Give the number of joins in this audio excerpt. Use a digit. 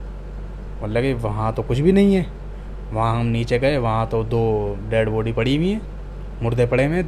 0